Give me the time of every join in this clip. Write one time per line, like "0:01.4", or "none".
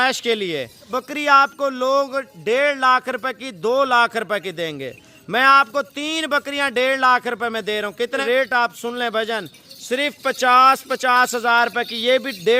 0:00.9
0:08.2